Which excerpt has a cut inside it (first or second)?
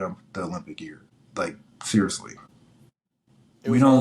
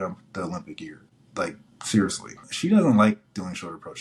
second